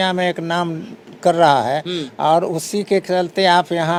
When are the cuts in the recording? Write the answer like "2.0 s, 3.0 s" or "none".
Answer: none

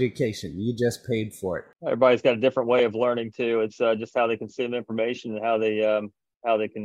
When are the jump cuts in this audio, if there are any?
1.7 s

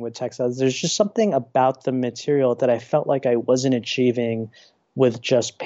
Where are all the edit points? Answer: none

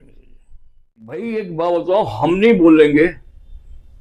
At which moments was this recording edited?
1.2 s

